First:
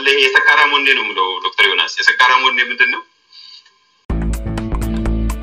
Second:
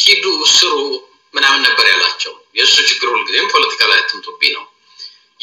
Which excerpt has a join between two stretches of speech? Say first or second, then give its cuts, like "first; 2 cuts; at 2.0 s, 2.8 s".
first; 1 cut; at 4.1 s